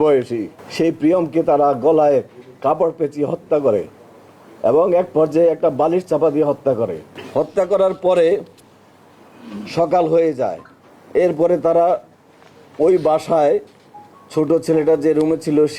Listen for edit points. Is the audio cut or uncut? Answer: uncut